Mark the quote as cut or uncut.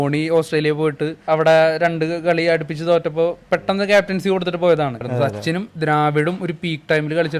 cut